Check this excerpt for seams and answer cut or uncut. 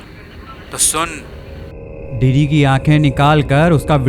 cut